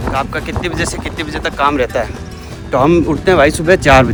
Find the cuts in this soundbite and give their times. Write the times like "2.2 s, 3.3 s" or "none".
none